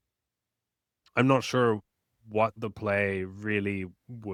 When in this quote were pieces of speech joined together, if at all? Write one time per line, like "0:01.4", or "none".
none